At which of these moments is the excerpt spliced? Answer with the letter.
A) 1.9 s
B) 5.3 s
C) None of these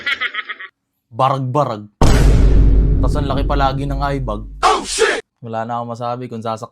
B